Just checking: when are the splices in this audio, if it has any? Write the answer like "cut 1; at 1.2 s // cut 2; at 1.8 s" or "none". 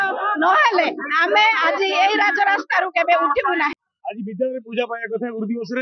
cut 1; at 3.9 s